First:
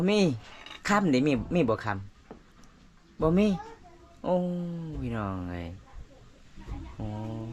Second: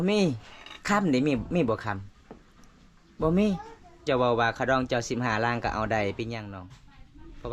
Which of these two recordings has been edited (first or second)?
second